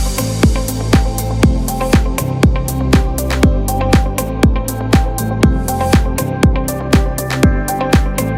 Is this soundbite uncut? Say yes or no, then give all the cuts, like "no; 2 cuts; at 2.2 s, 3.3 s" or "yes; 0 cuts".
yes; 0 cuts